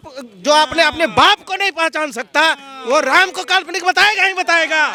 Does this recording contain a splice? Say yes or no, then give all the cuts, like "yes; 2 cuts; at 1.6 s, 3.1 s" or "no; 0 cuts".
no; 0 cuts